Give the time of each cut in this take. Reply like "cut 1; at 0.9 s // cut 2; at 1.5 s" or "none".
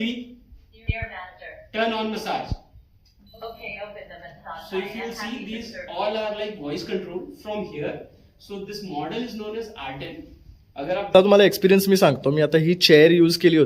cut 1; at 11.1 s